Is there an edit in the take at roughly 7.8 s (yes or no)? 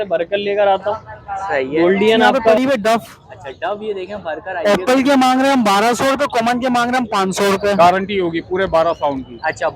yes